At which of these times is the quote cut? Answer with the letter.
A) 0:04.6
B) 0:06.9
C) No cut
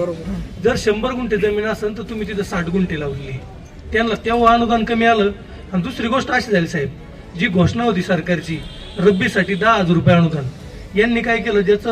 C